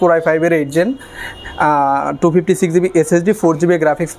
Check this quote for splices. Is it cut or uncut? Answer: uncut